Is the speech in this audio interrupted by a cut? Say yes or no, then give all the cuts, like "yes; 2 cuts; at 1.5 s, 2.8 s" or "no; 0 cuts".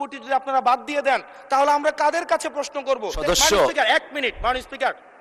yes; 1 cut; at 3.1 s